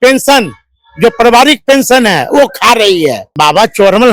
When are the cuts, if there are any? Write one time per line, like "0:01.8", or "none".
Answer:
0:03.2